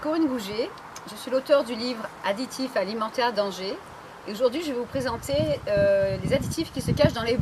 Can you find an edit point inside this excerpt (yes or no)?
no